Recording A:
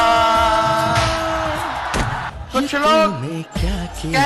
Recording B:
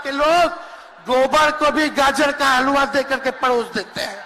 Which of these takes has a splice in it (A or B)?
A